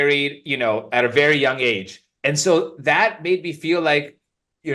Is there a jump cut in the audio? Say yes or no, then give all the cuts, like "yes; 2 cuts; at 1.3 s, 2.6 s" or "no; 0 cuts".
no; 0 cuts